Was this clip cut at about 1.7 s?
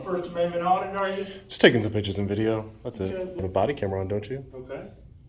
no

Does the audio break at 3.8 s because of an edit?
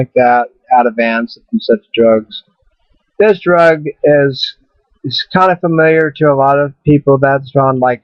no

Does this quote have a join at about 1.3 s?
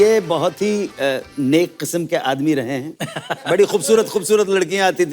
no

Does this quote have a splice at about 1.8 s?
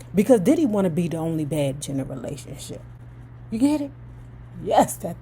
yes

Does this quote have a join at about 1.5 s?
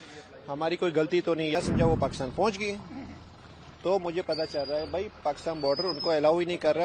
yes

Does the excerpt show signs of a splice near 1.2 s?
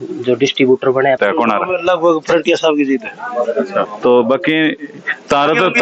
yes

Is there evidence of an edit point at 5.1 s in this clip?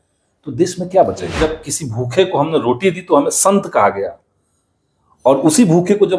no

